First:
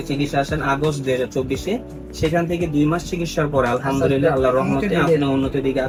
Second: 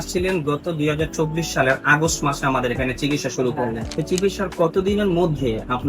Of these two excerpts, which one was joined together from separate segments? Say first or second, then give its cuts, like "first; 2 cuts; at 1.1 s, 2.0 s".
second; 1 cut; at 3.9 s